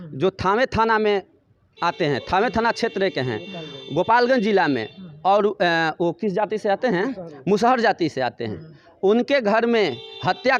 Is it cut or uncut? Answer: uncut